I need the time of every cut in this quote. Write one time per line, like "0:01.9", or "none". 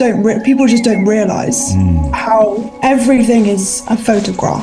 0:02.7